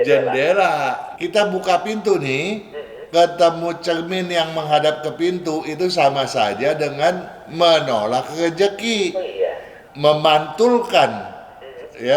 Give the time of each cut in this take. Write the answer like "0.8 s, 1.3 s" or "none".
1.1 s, 9.8 s